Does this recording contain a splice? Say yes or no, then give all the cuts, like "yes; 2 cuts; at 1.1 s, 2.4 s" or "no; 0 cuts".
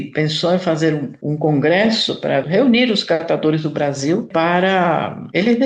yes; 2 cuts; at 2.4 s, 4.3 s